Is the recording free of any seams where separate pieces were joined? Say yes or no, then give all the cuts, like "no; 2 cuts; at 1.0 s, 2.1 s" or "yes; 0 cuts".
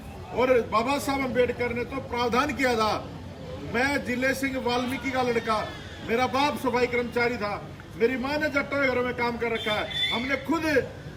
yes; 0 cuts